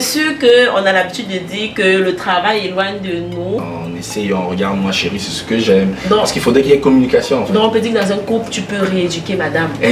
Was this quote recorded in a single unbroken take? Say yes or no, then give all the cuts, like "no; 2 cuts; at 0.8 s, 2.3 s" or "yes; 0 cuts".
no; 1 cut; at 3.7 s